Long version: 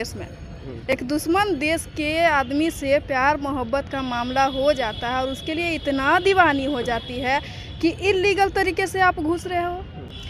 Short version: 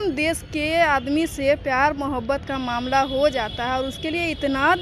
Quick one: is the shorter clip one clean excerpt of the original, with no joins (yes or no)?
yes